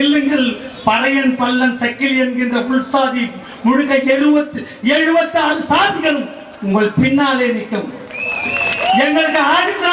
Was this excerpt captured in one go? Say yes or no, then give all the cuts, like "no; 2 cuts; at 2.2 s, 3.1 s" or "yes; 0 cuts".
yes; 0 cuts